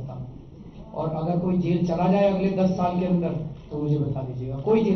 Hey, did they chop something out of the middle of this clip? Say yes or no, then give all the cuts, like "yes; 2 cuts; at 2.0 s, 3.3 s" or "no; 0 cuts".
no; 0 cuts